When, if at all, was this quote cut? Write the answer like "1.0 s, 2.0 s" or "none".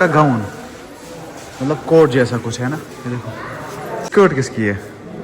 4.1 s

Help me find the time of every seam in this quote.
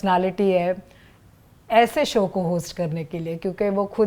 none

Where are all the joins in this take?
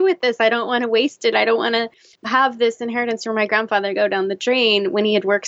2.3 s

